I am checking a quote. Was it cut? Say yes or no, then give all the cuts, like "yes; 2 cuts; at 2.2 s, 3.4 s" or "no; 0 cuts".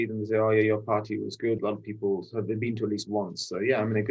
yes; 1 cut; at 1.6 s